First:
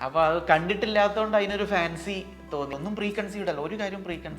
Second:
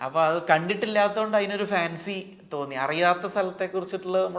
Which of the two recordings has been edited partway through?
first; 1 cut; at 2.7 s

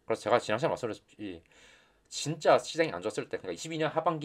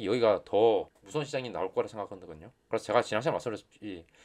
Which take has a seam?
second; 1 cut; at 1.0 s

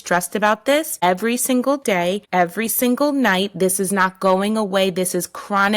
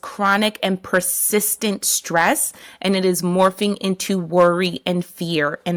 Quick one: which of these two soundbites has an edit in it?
first; 2 cuts; at 0.9 s, 2.2 s

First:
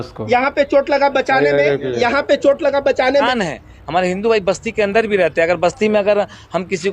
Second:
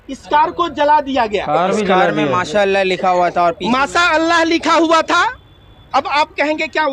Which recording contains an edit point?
first; 1 cut; at 3.3 s

